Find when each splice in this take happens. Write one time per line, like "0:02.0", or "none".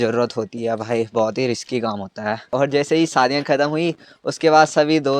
0:02.5